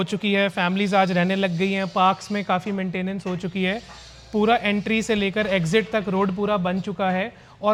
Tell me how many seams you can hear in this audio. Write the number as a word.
zero